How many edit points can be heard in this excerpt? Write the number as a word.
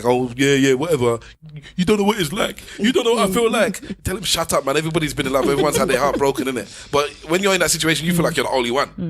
one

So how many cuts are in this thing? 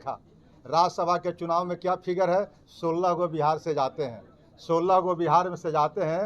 zero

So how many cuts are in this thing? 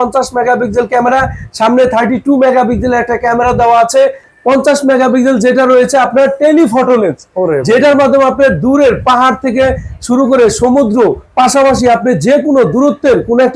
one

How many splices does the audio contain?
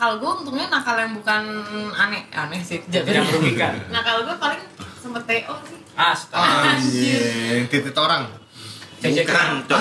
zero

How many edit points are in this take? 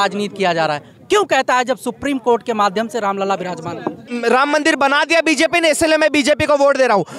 one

